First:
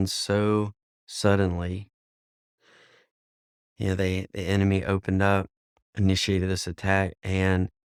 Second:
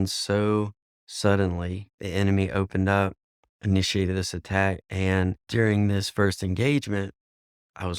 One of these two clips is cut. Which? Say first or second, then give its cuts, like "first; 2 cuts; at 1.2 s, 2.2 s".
second; 2 cuts; at 2.0 s, 5.4 s